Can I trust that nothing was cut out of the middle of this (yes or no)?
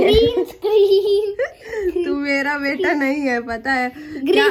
yes